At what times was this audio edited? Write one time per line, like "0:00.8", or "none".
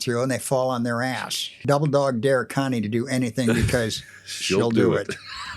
0:01.5